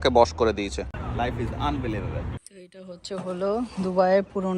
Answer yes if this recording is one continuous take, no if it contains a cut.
no